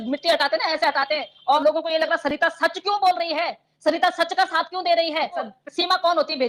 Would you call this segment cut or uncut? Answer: cut